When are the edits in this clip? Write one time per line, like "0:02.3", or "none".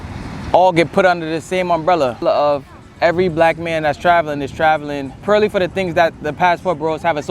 0:02.2
0:05.1